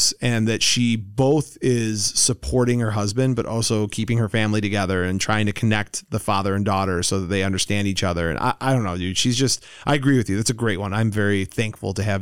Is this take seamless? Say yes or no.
yes